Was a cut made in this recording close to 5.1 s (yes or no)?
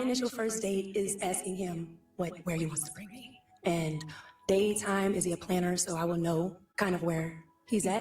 no